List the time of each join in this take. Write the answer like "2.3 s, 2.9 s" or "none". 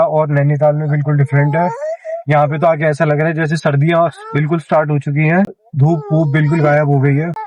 none